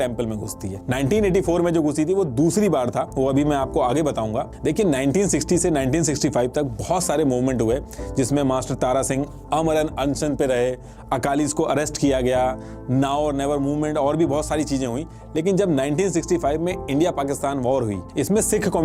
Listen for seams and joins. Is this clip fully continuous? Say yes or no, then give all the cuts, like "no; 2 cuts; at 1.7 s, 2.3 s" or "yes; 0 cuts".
yes; 0 cuts